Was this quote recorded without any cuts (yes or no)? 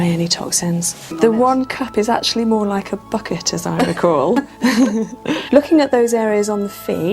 no